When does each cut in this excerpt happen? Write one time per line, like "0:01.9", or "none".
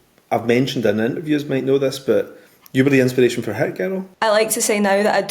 0:04.1